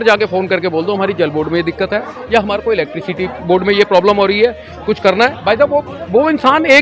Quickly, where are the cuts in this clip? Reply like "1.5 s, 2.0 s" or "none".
none